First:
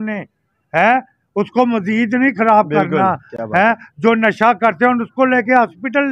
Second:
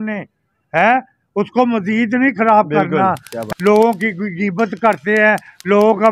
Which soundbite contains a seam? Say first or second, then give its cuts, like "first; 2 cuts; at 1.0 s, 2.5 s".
second; 1 cut; at 3.4 s